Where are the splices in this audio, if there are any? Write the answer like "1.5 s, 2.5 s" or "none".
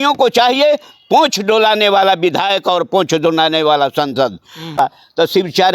4.8 s